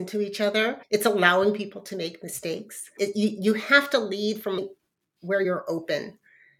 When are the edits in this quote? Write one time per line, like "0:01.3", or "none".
0:02.9